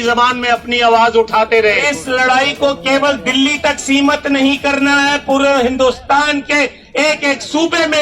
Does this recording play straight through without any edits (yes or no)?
no